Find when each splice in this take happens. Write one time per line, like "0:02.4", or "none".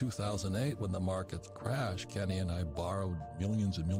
none